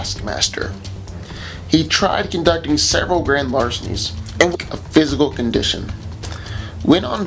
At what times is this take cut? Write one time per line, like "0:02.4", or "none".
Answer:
none